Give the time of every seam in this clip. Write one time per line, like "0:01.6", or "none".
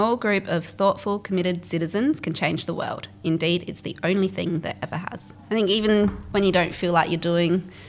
0:05.4